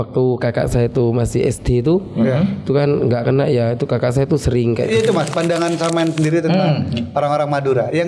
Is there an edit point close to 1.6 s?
no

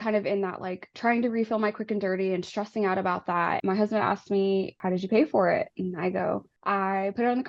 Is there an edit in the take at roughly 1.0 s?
no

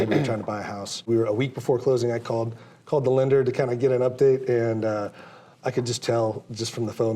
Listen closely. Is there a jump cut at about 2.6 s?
no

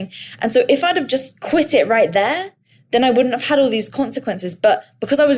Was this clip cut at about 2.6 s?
no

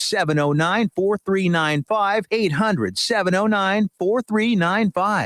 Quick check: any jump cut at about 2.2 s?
yes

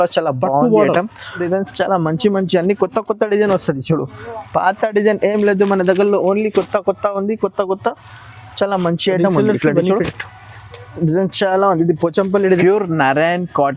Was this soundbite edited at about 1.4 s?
yes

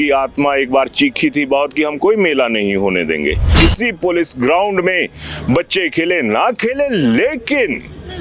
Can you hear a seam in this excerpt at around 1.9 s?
no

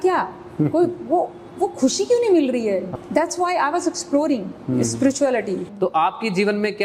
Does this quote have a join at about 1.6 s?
no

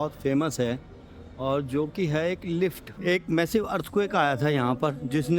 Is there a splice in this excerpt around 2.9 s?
yes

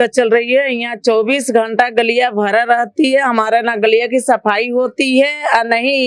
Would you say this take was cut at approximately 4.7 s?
no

